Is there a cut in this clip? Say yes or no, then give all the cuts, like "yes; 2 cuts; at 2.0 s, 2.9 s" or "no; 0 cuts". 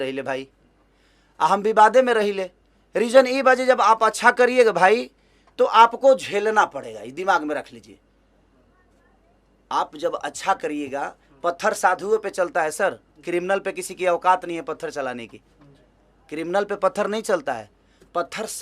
no; 0 cuts